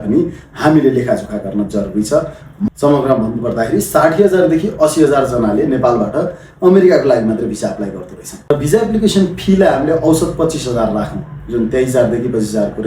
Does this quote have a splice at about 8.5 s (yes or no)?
yes